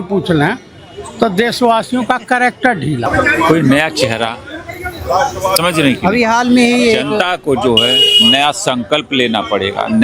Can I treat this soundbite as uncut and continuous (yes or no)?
no